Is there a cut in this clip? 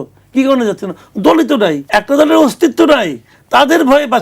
yes; 1 cut; at 1.8 s

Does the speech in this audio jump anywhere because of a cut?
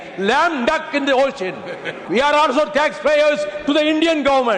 yes; 1 cut; at 1.9 s

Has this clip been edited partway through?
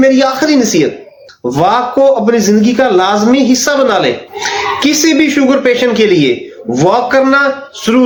no; 0 cuts

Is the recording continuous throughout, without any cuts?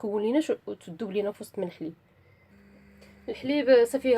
no; 1 cut; at 2.0 s

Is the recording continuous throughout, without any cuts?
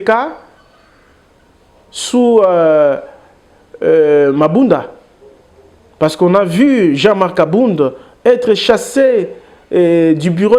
yes; 0 cuts

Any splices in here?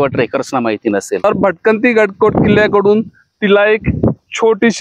yes; 1 cut; at 1.2 s

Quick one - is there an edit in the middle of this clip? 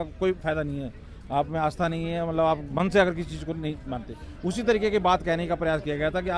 no; 0 cuts

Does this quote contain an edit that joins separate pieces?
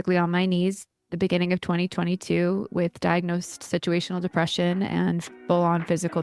no; 0 cuts

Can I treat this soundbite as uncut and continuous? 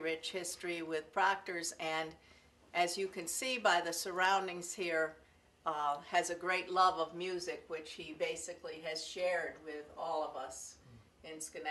no; 1 cut; at 9.1 s

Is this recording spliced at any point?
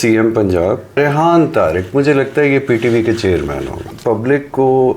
yes; 2 cuts; at 1.0 s, 3.9 s

